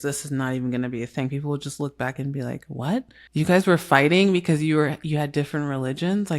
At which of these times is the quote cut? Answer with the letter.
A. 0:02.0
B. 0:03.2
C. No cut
B